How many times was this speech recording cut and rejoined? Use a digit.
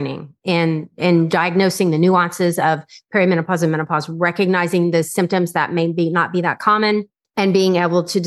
1